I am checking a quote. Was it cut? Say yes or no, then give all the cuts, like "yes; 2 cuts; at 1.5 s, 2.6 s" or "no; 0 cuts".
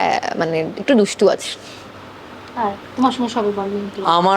no; 0 cuts